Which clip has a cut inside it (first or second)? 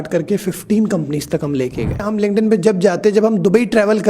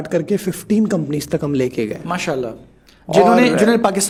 first